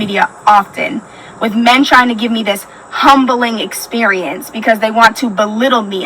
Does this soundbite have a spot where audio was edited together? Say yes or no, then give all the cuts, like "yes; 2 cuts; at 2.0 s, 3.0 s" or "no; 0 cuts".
yes; 1 cut; at 3.6 s